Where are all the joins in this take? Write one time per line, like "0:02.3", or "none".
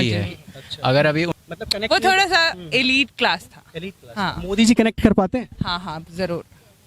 0:01.3